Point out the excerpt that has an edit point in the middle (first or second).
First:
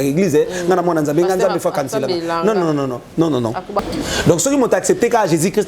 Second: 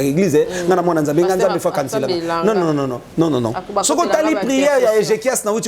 first